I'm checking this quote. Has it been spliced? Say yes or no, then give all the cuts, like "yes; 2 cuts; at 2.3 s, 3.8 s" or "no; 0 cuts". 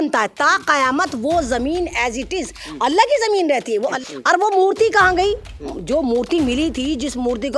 yes; 1 cut; at 4.0 s